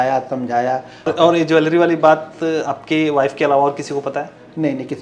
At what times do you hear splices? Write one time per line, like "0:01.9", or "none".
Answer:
0:01.1